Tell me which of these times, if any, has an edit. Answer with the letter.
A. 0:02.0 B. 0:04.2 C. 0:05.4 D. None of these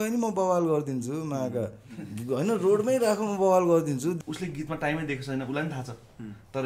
B